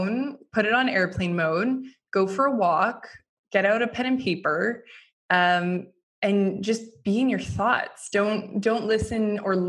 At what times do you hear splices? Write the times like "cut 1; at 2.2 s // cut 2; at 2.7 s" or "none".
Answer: none